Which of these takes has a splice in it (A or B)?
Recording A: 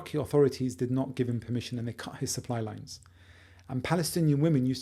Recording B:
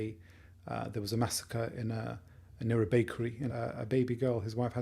B